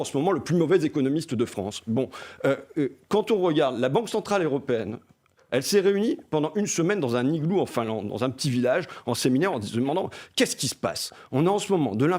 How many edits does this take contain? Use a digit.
0